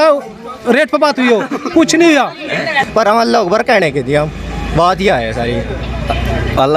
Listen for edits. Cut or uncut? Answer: cut